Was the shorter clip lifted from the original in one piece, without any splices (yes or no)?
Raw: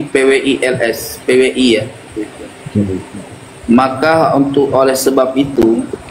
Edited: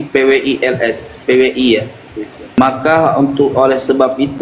no